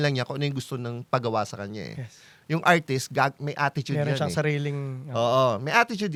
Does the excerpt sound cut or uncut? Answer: uncut